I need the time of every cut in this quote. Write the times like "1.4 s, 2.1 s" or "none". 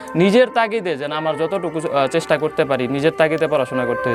none